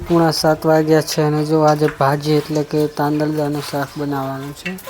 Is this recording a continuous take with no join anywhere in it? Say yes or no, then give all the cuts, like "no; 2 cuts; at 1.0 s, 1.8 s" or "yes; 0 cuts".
yes; 0 cuts